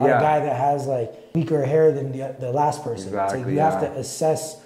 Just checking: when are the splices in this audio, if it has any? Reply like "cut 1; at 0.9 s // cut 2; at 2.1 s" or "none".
cut 1; at 1.2 s